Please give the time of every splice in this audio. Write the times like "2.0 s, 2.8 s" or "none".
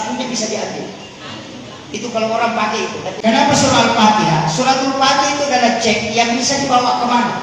3.2 s